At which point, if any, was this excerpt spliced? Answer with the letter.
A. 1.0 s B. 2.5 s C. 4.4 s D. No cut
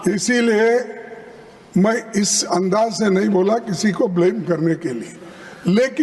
D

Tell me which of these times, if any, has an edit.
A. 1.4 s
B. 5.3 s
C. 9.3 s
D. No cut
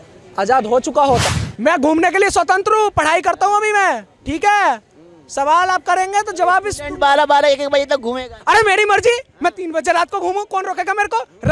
A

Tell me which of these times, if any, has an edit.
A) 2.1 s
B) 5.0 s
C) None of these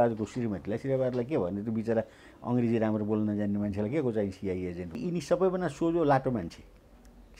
B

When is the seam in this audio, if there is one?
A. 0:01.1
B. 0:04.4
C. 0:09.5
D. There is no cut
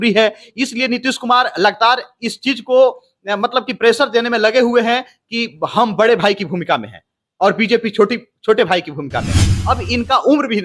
C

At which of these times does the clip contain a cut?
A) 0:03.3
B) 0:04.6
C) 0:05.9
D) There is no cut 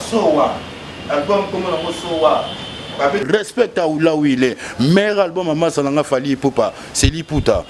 A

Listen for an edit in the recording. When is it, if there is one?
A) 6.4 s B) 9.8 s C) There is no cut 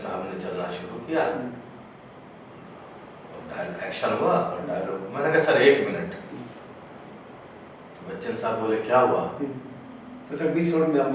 C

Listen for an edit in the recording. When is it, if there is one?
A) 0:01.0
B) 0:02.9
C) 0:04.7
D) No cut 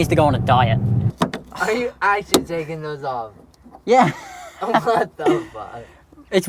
A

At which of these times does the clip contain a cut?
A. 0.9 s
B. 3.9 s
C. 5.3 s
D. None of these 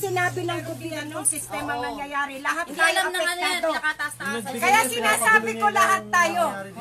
A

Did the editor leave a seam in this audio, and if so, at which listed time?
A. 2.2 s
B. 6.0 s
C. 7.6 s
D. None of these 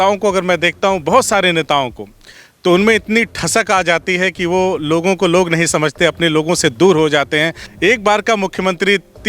C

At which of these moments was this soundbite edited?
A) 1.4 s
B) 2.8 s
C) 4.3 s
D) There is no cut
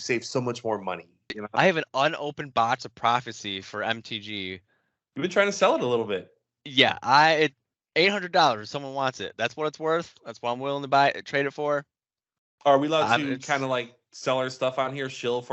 A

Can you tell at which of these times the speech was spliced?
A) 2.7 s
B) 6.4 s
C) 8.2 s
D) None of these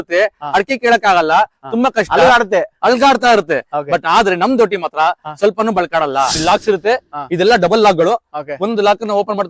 B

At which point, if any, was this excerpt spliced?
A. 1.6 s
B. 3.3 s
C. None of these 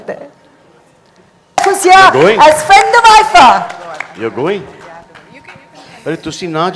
A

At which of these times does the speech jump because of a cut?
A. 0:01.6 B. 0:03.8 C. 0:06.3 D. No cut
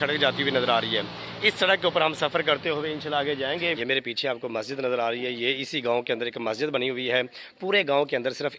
B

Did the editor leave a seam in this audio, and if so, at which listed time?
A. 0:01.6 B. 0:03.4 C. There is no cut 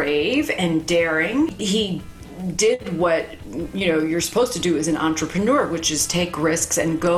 A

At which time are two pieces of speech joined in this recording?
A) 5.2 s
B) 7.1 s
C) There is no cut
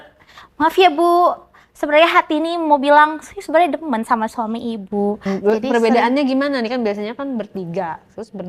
A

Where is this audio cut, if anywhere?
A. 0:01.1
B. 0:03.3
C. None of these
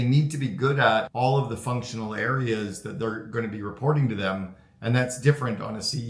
A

